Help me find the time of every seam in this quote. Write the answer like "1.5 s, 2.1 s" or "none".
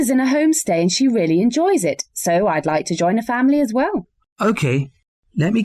0.9 s